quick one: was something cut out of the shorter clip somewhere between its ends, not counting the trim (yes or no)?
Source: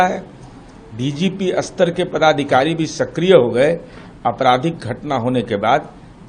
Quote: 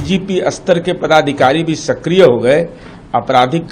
no